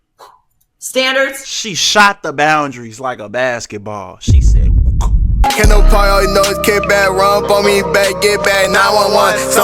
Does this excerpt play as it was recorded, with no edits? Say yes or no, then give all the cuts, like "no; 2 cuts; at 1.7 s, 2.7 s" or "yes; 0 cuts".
no; 1 cut; at 5.3 s